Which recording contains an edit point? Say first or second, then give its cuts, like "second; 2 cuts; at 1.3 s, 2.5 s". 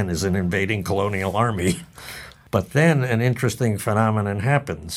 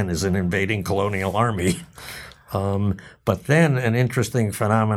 first; 1 cut; at 2.4 s